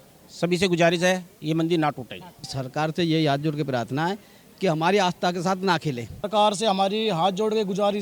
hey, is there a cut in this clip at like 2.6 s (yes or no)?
yes